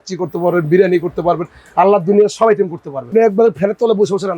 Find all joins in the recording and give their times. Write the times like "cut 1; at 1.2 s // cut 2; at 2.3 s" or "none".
cut 1; at 3.1 s